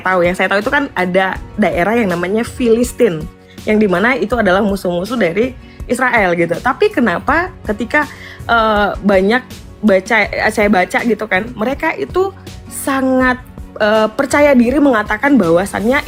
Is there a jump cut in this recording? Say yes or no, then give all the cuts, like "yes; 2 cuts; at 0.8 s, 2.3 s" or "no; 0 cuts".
no; 0 cuts